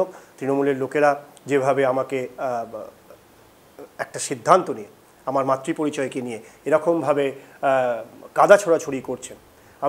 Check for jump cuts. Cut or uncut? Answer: uncut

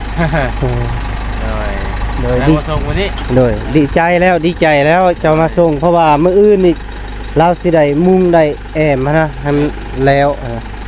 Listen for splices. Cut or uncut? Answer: uncut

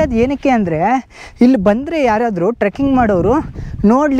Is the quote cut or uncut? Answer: uncut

